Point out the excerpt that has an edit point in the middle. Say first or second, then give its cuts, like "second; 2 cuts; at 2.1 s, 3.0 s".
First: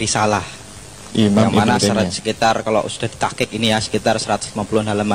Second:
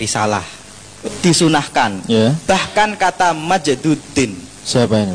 second; 1 cut; at 1.1 s